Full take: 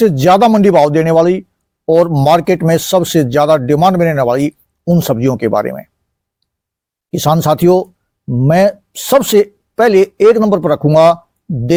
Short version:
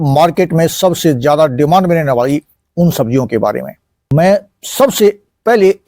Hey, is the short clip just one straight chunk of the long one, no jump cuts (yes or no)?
no